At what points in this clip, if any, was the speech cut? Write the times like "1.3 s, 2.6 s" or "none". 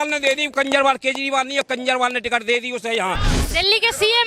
3.3 s